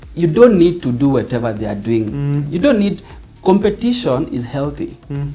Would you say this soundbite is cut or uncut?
uncut